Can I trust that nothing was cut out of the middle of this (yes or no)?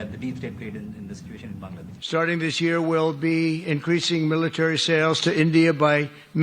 no